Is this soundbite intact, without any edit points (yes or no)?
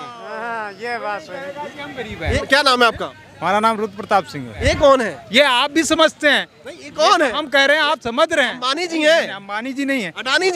no